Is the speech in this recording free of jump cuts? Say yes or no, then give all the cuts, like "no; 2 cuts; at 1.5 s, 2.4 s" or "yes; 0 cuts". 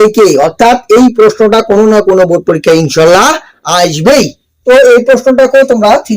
no; 1 cut; at 4.4 s